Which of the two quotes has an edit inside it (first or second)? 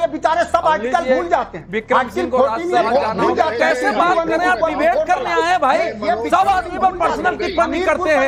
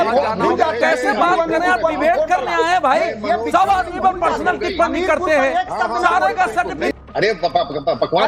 second